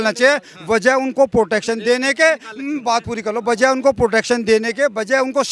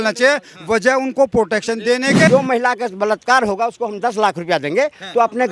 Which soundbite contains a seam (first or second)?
second